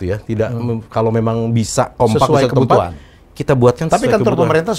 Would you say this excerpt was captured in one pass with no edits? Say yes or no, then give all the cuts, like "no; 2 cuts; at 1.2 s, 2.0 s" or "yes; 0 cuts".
yes; 0 cuts